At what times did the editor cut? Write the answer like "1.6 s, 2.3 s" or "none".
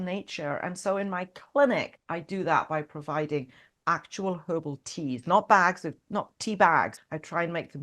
2.0 s, 7.0 s